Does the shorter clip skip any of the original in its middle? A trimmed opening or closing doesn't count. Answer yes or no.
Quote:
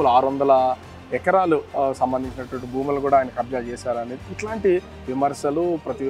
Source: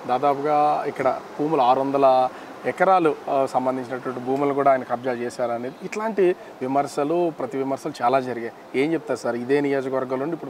no